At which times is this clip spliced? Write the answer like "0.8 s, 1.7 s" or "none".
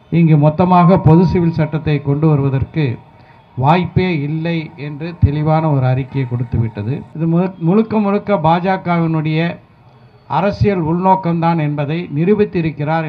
7.1 s